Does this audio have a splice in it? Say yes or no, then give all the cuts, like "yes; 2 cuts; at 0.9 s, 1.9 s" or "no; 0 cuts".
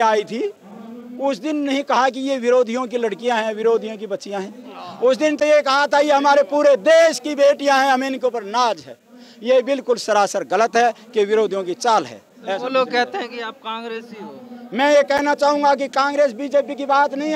no; 0 cuts